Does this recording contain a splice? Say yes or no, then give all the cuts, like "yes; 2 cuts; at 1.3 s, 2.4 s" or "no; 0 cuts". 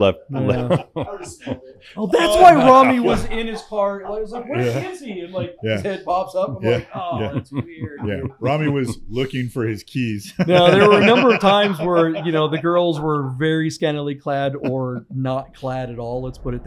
no; 0 cuts